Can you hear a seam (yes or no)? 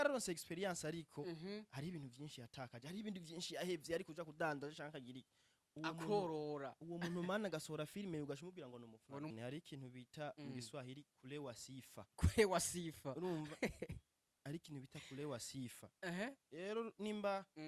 yes